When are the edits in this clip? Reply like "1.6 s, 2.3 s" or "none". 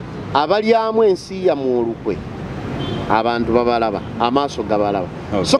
none